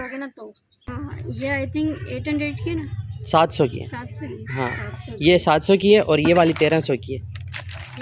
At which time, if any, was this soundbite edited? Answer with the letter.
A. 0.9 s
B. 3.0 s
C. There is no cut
A